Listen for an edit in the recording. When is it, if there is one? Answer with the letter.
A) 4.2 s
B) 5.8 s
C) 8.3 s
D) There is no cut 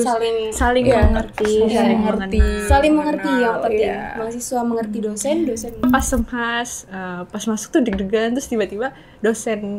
B